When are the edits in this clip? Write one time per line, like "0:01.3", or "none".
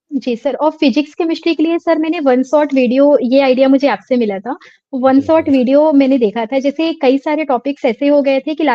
none